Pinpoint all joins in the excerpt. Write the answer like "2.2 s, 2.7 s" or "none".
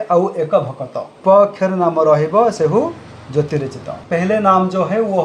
1.2 s, 4.0 s